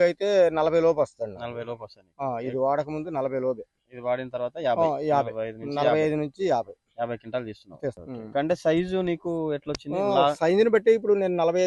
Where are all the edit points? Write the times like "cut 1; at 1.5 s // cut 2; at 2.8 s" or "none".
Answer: cut 1; at 7.9 s